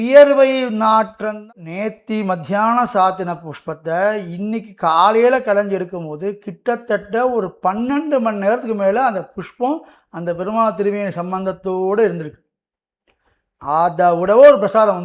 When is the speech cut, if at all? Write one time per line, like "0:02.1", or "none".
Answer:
0:01.5